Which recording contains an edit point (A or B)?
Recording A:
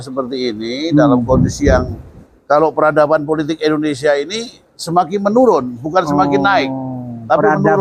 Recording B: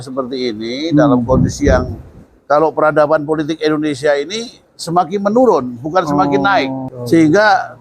B